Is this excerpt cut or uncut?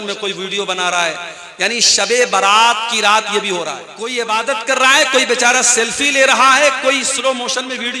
cut